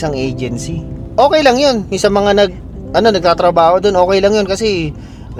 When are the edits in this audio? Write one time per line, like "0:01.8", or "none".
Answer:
none